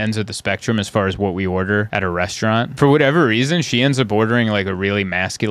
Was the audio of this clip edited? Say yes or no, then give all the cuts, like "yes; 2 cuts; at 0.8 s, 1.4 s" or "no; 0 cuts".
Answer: yes; 1 cut; at 2.4 s